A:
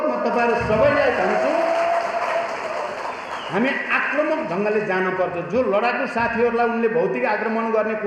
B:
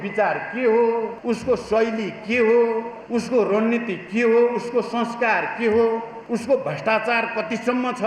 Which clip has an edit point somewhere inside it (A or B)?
B